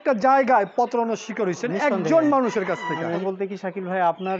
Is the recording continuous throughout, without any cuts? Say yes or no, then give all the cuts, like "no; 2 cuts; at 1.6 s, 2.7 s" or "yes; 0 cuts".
no; 1 cut; at 3.2 s